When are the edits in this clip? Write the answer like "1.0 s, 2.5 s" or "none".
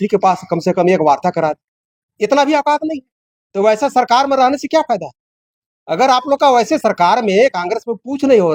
none

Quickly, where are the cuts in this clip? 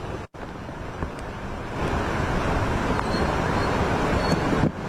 none

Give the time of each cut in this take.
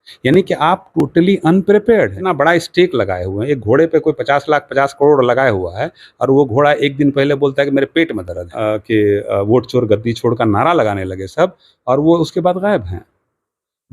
2.2 s, 8.5 s

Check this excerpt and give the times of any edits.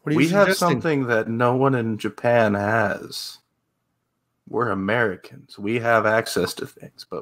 none

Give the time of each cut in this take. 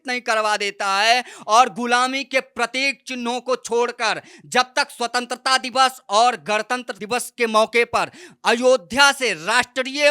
6.9 s

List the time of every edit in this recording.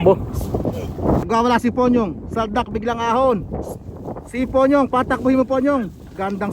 1.2 s

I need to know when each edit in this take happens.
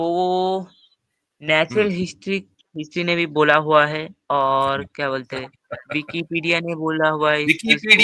none

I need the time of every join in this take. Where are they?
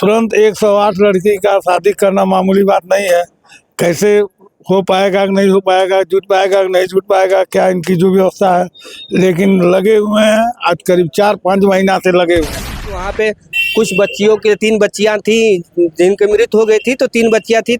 12.9 s

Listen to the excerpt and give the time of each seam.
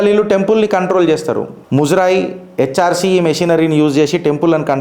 1.5 s

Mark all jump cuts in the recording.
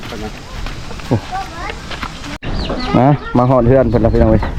2.4 s

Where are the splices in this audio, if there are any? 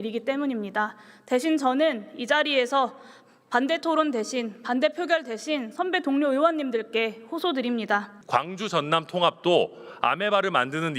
8.1 s

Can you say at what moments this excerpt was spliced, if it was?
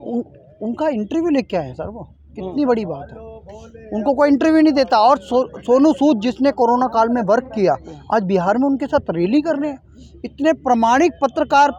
none

